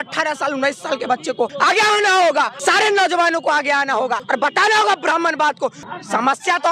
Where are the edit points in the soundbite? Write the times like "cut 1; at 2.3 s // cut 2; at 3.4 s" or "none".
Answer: cut 1; at 1.5 s // cut 2; at 2.5 s // cut 3; at 4.2 s // cut 4; at 5.8 s